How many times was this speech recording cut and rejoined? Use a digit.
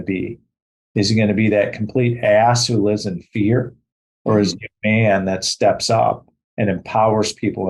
0